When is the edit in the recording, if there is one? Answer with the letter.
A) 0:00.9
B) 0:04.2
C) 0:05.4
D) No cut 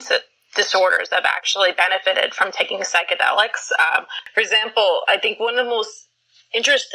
B